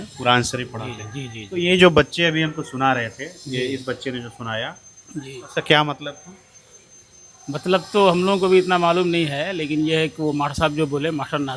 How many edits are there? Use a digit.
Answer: 0